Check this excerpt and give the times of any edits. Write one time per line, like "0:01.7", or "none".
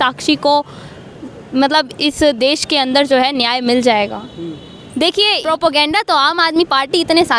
0:05.4